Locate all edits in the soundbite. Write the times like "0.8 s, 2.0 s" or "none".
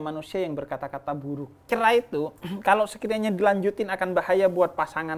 1.6 s